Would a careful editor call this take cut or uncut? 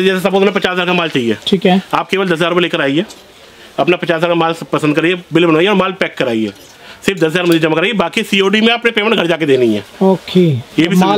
uncut